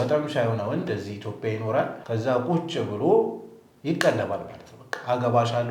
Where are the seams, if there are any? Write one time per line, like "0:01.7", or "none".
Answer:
0:02.0